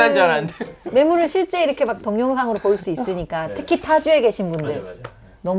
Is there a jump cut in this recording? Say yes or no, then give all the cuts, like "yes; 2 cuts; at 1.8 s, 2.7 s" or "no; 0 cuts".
no; 0 cuts